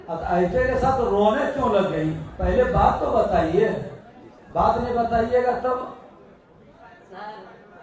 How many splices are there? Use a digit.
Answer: 0